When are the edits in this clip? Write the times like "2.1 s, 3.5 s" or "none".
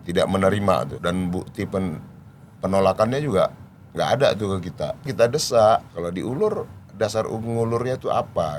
0.9 s, 5.1 s, 5.9 s